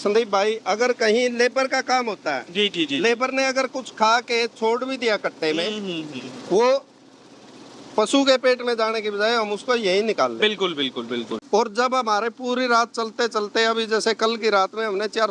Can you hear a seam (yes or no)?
yes